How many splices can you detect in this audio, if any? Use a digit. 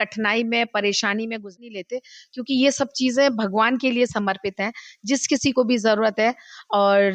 1